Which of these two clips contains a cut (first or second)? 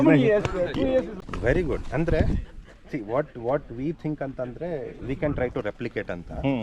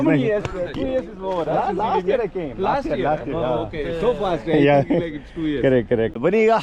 first